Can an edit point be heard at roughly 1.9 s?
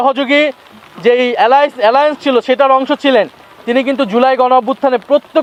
no; 0 cuts

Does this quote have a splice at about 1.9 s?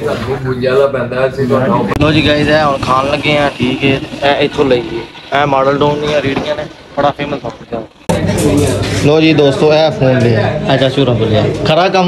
yes; 2 cuts; at 1.9 s, 7.8 s

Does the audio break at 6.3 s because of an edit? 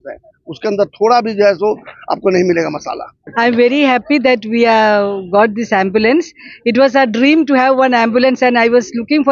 no; 1 cut; at 3.1 s

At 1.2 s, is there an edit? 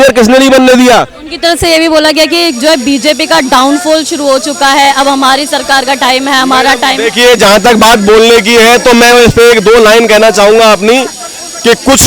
no; 0 cuts

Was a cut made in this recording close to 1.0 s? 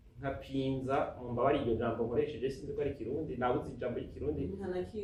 no; 0 cuts

